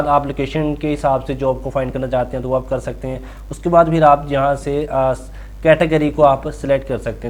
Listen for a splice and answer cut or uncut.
uncut